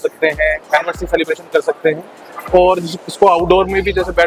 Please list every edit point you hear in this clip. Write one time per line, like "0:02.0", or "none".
none